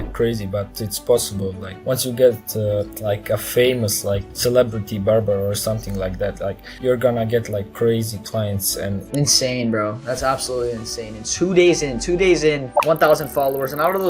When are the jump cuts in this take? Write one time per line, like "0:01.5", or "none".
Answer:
0:01.7
0:02.9
0:04.3
0:06.7
0:09.0
0:12.7